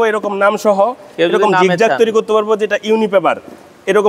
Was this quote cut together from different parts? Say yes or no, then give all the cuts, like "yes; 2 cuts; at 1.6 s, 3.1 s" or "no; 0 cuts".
no; 0 cuts